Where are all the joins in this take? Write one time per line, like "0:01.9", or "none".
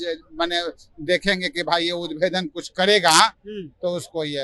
none